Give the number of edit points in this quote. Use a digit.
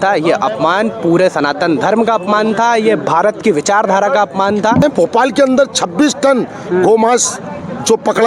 1